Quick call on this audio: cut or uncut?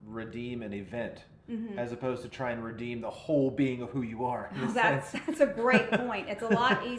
uncut